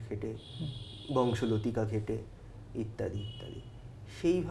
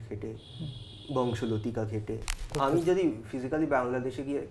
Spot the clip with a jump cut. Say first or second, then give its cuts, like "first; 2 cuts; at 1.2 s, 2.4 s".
second; 1 cut; at 2.5 s